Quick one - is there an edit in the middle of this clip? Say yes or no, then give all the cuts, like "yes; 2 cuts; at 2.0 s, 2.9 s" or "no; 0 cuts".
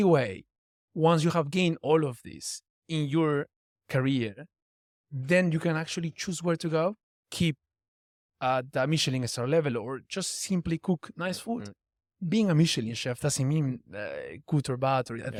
no; 0 cuts